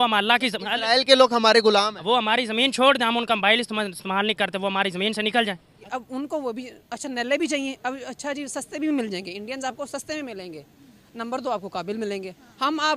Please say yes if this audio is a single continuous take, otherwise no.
no